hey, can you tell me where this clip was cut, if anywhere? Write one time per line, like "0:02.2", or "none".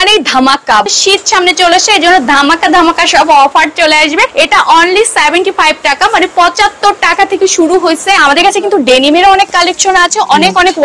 0:00.8
0:04.3
0:08.2